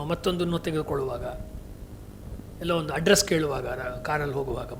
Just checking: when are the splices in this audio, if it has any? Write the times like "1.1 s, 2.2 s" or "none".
none